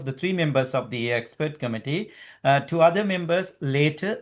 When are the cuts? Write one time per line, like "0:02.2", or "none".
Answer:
none